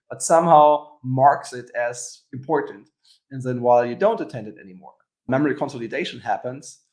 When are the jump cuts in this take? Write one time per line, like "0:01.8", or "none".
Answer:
0:05.3